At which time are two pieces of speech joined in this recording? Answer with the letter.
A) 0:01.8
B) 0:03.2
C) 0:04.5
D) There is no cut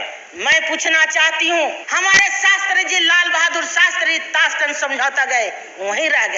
A